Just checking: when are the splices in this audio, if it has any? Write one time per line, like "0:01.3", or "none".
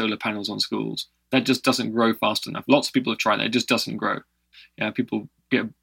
none